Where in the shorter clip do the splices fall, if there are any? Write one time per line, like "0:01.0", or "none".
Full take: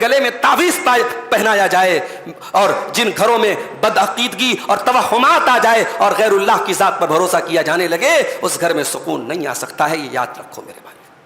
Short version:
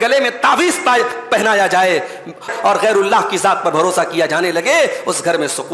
0:02.5